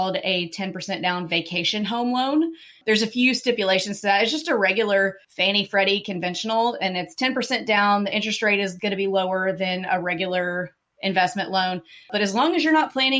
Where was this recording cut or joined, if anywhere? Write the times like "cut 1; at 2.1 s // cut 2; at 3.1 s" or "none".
cut 1; at 5.3 s